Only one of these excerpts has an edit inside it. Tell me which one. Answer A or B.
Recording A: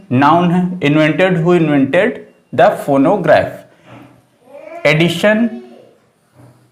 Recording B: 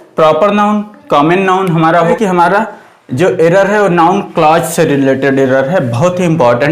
B